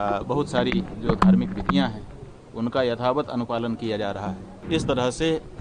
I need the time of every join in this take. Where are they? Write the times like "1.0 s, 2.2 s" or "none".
4.5 s